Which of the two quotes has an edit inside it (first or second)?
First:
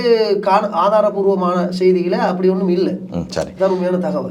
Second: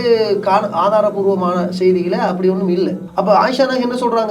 second